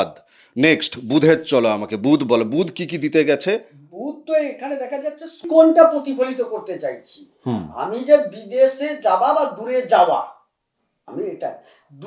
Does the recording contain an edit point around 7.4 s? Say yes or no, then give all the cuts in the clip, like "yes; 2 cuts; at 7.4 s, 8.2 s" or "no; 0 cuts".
no; 1 cut; at 5.4 s